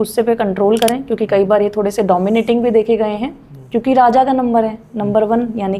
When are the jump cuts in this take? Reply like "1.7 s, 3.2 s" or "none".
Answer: none